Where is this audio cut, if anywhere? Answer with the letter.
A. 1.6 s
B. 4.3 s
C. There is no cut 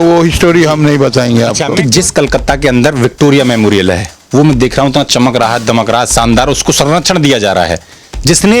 A